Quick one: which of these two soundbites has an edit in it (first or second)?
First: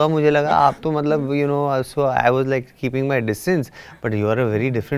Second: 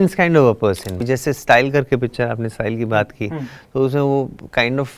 second